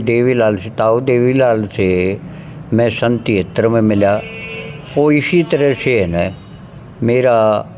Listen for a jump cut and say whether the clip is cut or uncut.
uncut